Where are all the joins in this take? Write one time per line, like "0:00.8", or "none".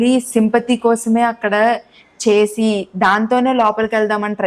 none